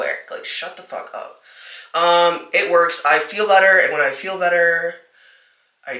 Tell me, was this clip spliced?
no; 0 cuts

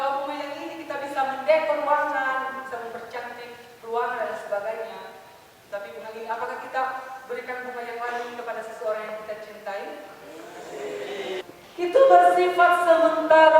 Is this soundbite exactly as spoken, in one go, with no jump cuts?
no; 1 cut; at 11.4 s

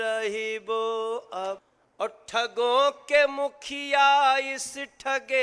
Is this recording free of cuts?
no; 1 cut; at 1.6 s

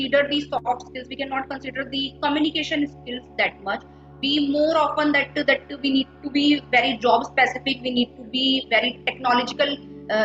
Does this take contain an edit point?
no; 0 cuts

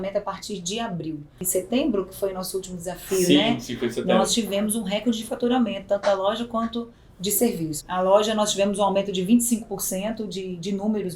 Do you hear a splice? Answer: yes; 2 cuts; at 1.4 s, 7.8 s

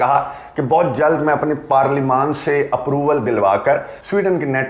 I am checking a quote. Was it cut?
no; 0 cuts

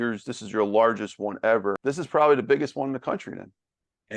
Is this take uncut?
no; 1 cut; at 1.8 s

